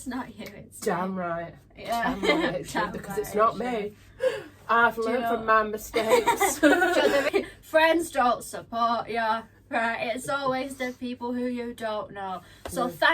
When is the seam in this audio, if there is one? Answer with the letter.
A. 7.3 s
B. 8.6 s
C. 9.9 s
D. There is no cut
A